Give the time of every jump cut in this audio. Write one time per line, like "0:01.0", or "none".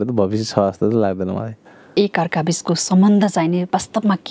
0:01.9